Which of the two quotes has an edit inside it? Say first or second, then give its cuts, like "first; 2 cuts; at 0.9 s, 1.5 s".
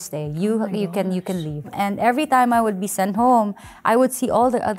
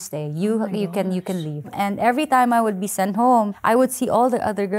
second; 1 cut; at 3.6 s